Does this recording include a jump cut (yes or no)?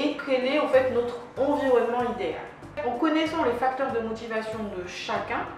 yes